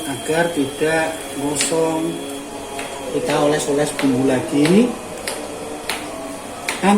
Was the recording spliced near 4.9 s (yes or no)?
no